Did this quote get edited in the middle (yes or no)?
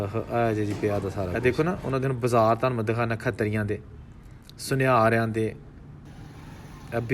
yes